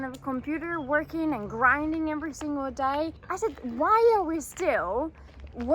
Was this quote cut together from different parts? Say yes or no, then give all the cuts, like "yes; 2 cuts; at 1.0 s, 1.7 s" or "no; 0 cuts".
yes; 1 cut; at 3.2 s